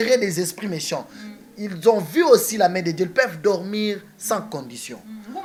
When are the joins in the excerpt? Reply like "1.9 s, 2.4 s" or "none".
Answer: none